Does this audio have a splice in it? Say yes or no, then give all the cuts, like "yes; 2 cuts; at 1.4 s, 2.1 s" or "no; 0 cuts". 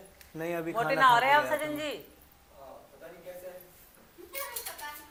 no; 0 cuts